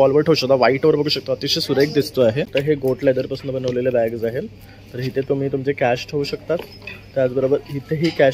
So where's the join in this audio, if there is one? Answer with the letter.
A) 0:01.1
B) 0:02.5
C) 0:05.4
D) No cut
B